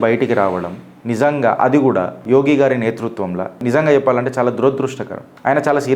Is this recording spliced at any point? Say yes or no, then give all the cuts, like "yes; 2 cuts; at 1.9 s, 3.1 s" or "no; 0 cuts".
no; 0 cuts